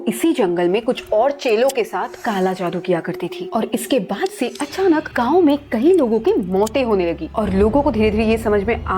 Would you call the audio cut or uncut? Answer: cut